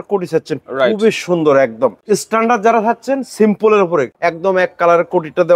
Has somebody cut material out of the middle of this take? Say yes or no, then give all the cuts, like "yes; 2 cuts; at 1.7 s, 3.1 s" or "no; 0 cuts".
yes; 2 cuts; at 2.0 s, 4.1 s